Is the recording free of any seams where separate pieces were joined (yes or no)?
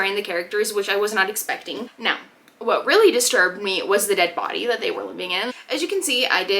no